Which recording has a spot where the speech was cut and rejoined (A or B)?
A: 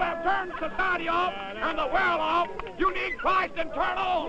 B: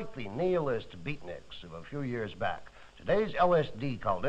A